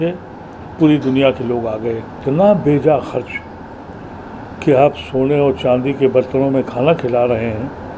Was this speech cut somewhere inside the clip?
yes; 1 cut; at 2.2 s

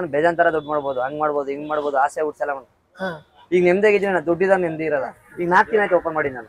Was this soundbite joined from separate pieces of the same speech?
yes; 1 cut; at 5.3 s

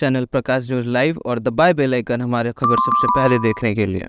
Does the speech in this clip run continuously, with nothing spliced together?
yes; 0 cuts

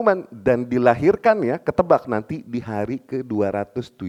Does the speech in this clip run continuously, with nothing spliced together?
yes; 0 cuts

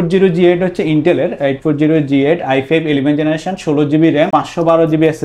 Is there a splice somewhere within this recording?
no; 0 cuts

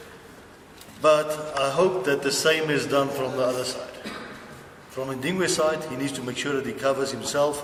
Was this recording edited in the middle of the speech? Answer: no; 0 cuts

